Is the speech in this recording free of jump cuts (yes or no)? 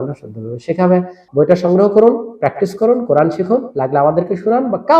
no